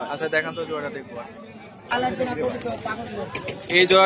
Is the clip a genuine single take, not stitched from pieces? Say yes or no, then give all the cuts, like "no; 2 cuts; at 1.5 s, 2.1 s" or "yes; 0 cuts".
no; 1 cut; at 1.9 s